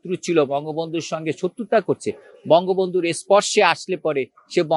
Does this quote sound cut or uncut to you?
uncut